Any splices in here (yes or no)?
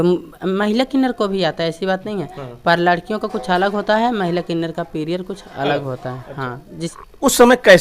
yes